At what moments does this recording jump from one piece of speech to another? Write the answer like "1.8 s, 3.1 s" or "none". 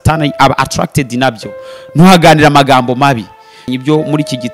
3.6 s